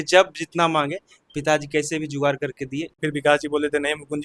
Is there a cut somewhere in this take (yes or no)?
yes